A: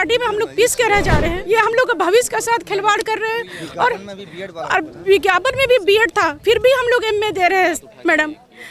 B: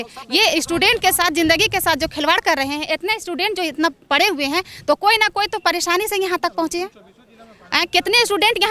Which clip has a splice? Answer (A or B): A